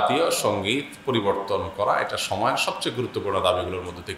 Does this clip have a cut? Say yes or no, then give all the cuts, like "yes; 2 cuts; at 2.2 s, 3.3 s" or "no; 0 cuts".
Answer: no; 0 cuts